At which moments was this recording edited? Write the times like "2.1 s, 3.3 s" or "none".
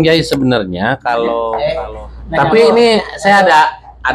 1.6 s